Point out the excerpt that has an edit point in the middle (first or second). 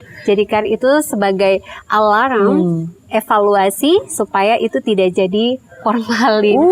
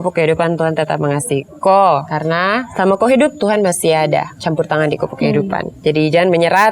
second